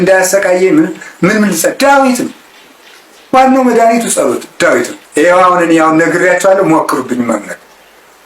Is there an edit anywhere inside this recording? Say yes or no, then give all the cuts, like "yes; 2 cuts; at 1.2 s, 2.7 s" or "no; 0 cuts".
yes; 1 cut; at 5.0 s